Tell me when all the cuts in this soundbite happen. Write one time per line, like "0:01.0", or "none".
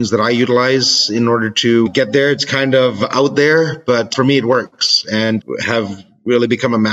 0:01.9
0:04.1
0:05.4